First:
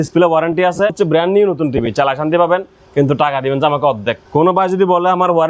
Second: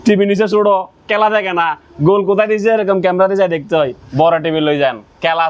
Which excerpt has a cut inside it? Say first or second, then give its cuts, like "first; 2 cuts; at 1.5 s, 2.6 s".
first; 2 cuts; at 0.9 s, 4.2 s